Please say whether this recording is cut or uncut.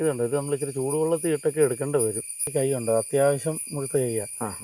cut